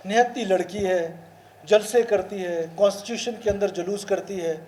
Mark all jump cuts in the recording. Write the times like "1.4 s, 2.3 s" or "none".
none